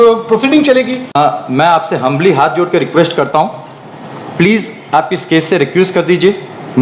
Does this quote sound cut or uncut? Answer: cut